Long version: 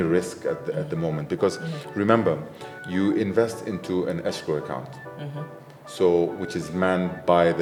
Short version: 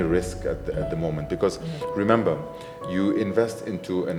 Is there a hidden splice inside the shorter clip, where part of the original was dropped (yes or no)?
no